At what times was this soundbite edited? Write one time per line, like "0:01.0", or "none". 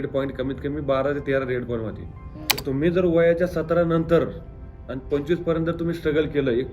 0:02.6